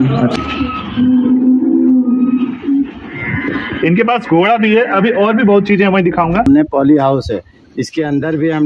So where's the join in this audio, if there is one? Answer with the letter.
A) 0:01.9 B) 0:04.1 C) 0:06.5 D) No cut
C